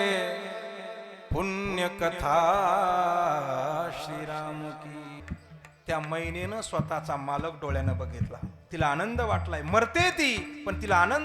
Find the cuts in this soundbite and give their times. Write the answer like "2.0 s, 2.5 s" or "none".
5.2 s